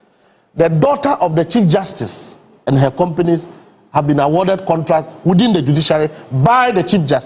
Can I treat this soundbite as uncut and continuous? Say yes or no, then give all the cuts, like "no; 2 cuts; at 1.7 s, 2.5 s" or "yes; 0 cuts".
yes; 0 cuts